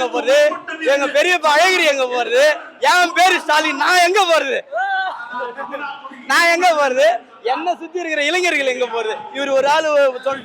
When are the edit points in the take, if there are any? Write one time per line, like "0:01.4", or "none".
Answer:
none

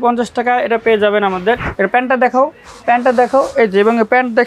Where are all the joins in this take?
0:01.7

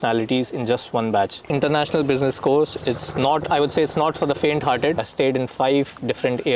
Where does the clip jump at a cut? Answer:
0:01.5
0:05.1

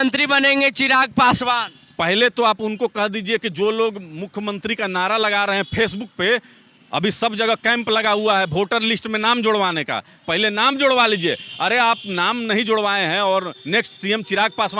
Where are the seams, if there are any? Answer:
none

